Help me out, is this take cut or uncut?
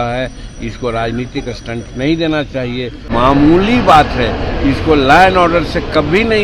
cut